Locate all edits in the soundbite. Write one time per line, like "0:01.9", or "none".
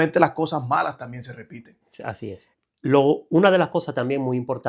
0:02.5